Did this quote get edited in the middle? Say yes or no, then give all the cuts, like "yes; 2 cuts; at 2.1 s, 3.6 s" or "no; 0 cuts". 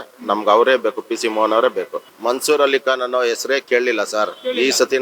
yes; 1 cut; at 2.0 s